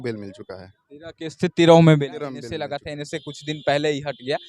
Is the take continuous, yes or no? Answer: no